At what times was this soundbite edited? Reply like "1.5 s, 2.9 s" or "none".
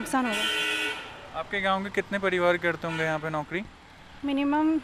none